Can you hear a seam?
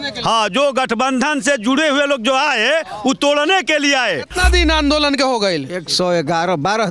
yes; 1 cut; at 4.3 s

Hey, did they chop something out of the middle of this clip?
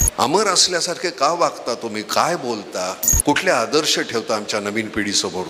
yes; 1 cut; at 3.1 s

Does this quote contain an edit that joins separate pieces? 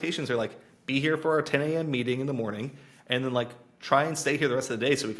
no; 0 cuts

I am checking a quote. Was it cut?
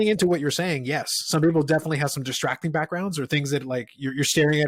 no; 0 cuts

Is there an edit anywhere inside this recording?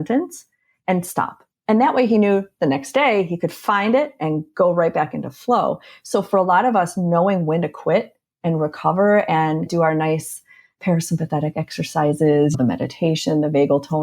yes; 2 cuts; at 9.7 s, 12.5 s

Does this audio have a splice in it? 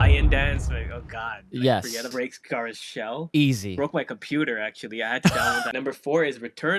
yes; 2 cuts; at 2.0 s, 5.7 s

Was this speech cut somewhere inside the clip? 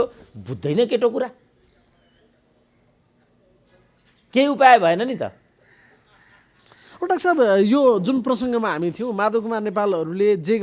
no; 0 cuts

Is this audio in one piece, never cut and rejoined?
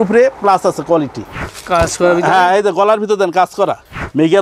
no; 1 cut; at 1.5 s

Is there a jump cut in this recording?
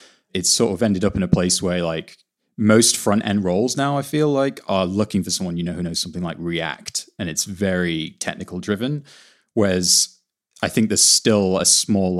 no; 0 cuts

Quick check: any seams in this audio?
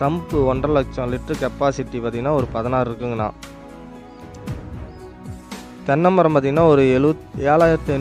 no; 0 cuts

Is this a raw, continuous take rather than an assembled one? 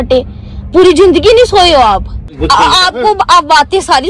no; 1 cut; at 2.3 s

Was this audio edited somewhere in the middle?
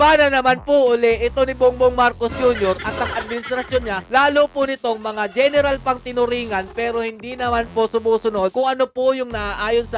no; 0 cuts

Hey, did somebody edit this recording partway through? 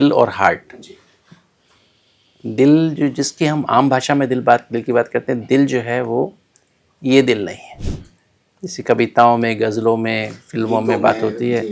no; 0 cuts

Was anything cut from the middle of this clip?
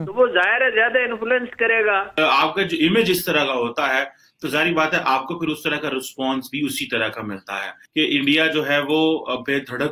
yes; 2 cuts; at 2.1 s, 7.8 s

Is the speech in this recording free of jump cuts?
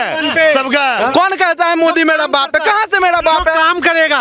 no; 1 cut; at 1.0 s

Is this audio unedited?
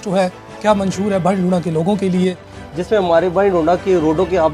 no; 1 cut; at 2.6 s

